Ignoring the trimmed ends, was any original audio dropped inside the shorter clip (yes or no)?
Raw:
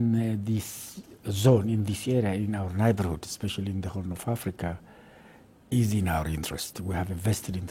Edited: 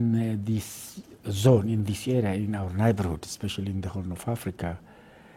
no